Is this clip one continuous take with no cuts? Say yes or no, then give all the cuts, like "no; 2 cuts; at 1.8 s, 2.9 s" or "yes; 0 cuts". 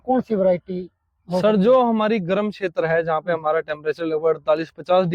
yes; 0 cuts